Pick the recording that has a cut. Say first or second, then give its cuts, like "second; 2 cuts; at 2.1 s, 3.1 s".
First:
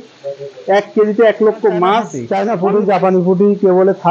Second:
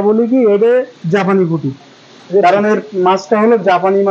first; 1 cut; at 2.2 s